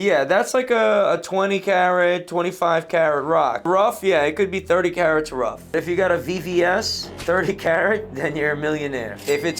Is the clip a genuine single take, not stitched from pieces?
no; 1 cut; at 5.7 s

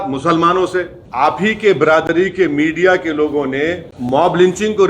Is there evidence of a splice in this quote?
yes; 2 cuts; at 1.0 s, 3.9 s

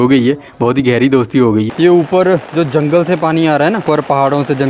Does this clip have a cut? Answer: yes; 2 cuts; at 1.7 s, 3.8 s

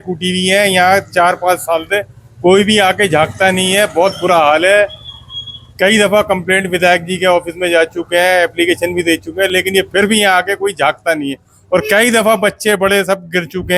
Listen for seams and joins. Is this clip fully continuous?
yes; 0 cuts

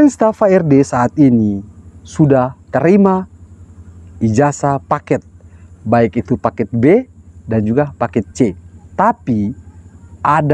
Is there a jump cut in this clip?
no; 0 cuts

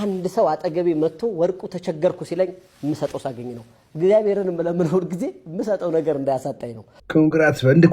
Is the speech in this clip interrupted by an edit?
yes; 1 cut; at 6.9 s

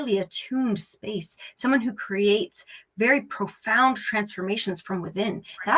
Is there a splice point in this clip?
no; 0 cuts

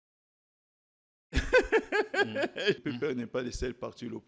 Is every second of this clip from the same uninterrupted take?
no; 1 cut; at 2.8 s

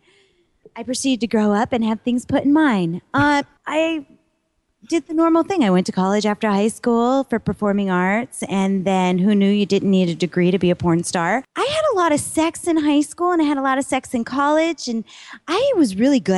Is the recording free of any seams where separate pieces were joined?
no; 2 cuts; at 3.6 s, 11.5 s

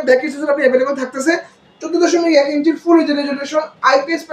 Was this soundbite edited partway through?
no; 0 cuts

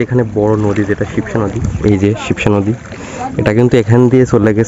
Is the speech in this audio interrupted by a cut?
no; 0 cuts

